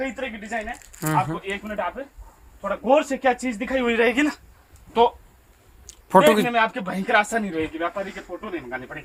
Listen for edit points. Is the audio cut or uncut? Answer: uncut